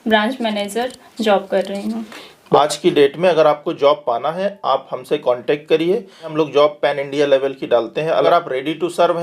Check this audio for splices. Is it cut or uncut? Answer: cut